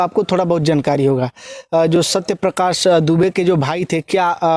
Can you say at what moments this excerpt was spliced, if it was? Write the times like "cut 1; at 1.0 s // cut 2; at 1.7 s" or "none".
none